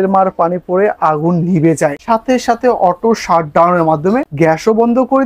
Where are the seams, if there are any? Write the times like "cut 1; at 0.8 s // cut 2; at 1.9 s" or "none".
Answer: cut 1; at 2.0 s // cut 2; at 4.3 s